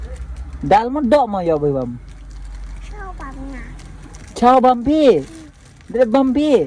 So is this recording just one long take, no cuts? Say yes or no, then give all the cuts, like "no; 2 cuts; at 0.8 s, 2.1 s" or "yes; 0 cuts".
yes; 0 cuts